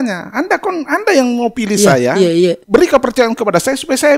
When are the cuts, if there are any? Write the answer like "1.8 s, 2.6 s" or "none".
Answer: 2.6 s